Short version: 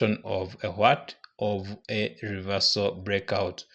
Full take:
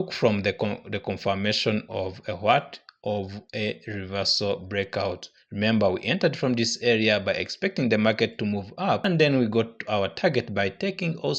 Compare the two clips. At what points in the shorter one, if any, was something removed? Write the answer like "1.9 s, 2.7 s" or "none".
none